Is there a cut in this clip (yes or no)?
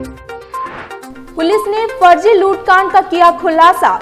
yes